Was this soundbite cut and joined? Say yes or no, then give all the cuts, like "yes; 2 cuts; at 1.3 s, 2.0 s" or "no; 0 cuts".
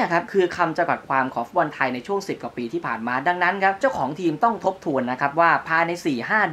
no; 0 cuts